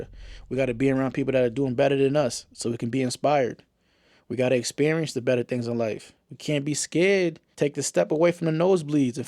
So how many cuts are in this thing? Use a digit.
1